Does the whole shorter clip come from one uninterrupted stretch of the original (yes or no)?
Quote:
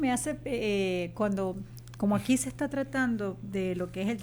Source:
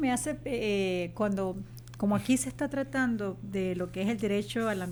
yes